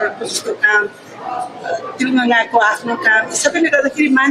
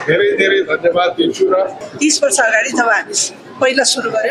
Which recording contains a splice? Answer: second; 1 cut; at 1.8 s

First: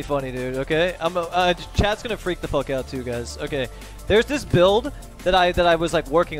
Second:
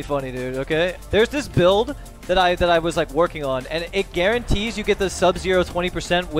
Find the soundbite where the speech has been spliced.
second; 2 cuts; at 1.0 s, 3.9 s

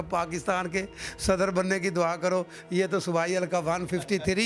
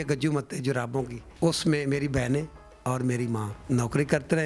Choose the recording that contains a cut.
second; 2 cuts; at 1.2 s, 3.5 s

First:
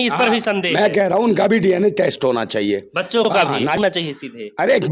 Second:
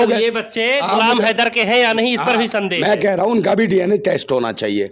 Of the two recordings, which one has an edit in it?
first; 1 cut; at 3.8 s

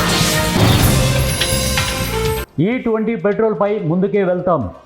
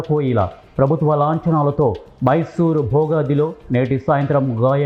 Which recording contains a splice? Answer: first; 1 cut; at 2.5 s

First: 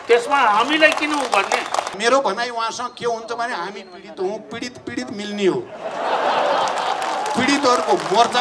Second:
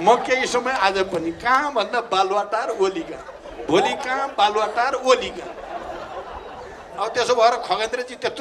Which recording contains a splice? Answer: first; 1 cut; at 1.9 s

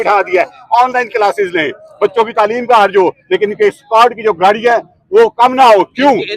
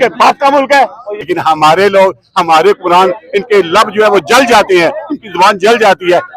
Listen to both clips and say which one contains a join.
second; 1 cut; at 1.2 s

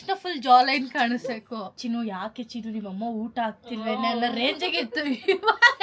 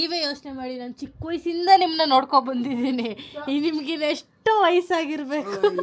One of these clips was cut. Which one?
first; 1 cut; at 1.8 s

